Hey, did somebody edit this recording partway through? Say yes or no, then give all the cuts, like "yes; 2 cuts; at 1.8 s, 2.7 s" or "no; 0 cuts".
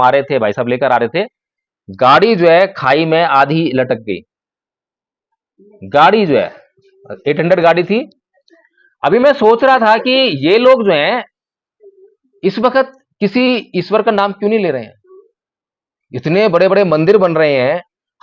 no; 0 cuts